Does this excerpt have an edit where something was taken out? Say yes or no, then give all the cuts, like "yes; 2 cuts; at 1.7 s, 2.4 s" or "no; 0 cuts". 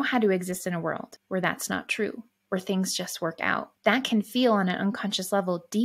yes; 2 cuts; at 1.1 s, 3.7 s